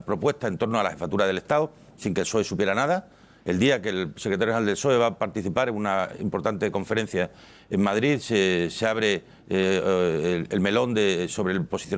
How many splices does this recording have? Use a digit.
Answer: 1